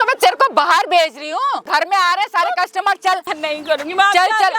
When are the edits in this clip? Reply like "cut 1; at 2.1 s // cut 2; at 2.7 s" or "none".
cut 1; at 1.7 s // cut 2; at 3.3 s